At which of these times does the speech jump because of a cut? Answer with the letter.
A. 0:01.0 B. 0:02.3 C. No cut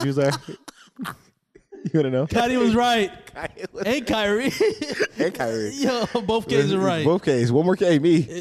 B